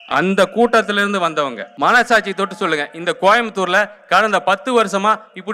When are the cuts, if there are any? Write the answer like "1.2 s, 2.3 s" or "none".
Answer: 1.6 s